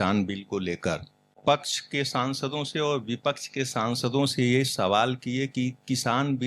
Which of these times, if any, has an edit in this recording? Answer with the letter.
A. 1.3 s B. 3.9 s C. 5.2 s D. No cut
A